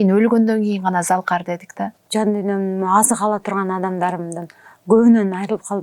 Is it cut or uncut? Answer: cut